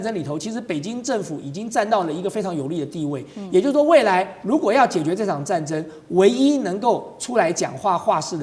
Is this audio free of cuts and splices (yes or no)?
yes